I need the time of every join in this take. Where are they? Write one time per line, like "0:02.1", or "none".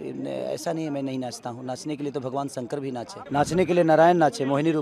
0:03.2